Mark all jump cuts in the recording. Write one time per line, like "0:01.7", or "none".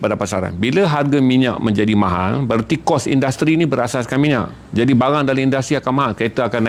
none